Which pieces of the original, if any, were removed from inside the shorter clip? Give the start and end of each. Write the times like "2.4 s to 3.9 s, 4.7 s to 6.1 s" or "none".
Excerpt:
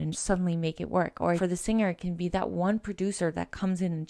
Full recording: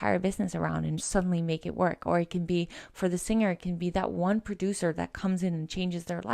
2.2 s to 3.0 s